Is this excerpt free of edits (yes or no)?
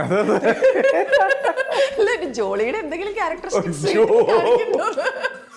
yes